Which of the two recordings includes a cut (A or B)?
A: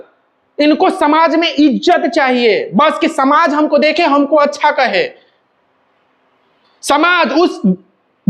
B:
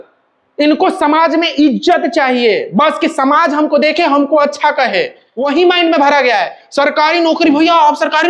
B